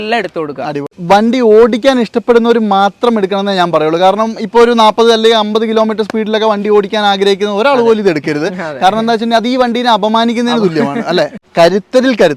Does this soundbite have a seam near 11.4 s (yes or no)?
yes